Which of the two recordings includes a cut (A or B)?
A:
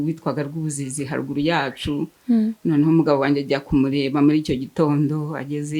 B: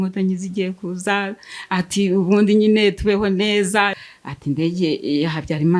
B